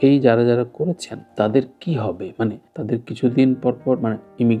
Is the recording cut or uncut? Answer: uncut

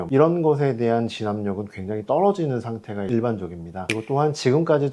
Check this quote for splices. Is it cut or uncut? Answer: cut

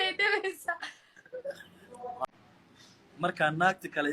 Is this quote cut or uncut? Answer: cut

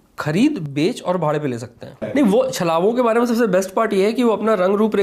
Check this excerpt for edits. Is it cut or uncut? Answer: cut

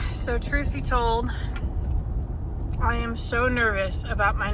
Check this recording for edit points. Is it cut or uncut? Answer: uncut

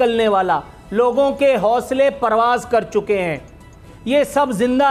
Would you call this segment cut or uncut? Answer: uncut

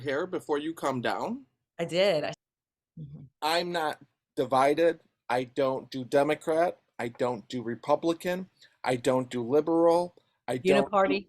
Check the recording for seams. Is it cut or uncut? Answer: cut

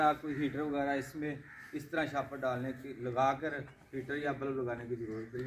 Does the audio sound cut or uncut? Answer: uncut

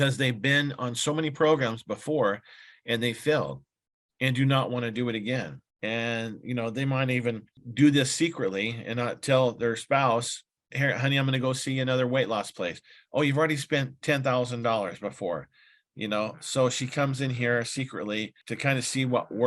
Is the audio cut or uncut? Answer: cut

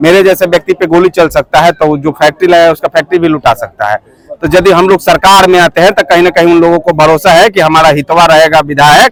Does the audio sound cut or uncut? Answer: uncut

